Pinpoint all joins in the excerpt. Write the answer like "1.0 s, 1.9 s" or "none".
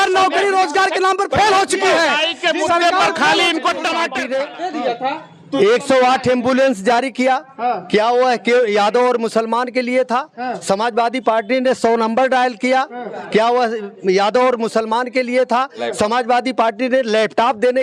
4.2 s